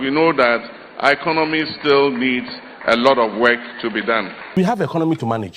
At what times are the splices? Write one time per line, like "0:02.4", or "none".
0:04.4